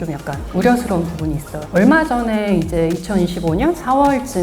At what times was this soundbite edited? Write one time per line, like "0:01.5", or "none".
0:01.6